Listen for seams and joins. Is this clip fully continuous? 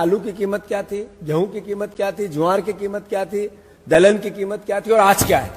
yes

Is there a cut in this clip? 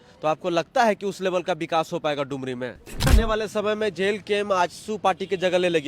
yes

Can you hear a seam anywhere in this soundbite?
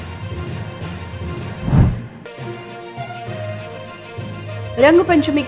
yes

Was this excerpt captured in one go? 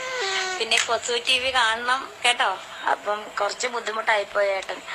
yes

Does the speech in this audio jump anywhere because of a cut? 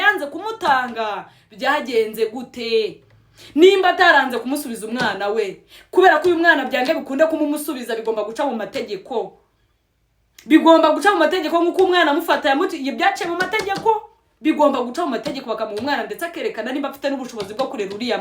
no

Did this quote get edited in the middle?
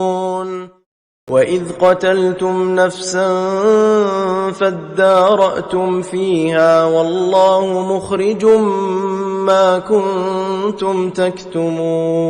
yes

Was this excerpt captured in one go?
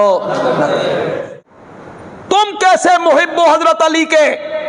no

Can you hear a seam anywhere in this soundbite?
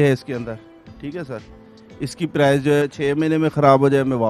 yes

